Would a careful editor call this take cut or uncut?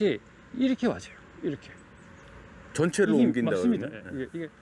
uncut